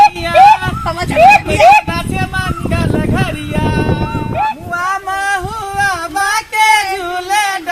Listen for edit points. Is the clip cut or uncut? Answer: cut